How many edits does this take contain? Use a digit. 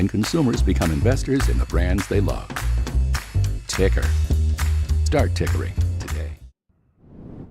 1